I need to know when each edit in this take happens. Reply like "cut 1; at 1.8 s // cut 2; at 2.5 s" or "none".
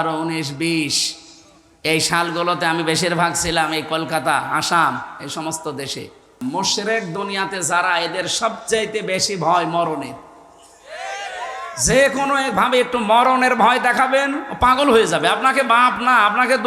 cut 1; at 6.3 s